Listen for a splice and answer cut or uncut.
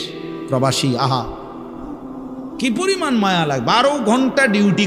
cut